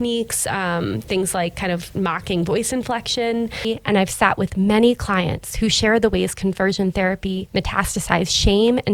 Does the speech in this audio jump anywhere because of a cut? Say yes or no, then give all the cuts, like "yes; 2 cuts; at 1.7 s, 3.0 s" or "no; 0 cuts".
yes; 1 cut; at 3.6 s